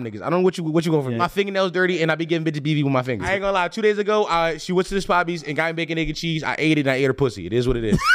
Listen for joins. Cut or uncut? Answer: cut